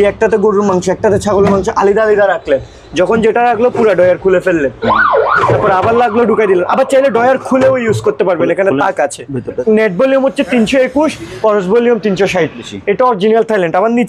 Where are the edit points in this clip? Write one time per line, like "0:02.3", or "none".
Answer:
0:09.6
0:12.7